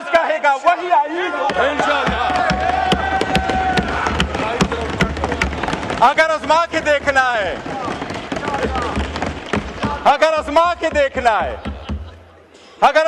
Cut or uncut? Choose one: uncut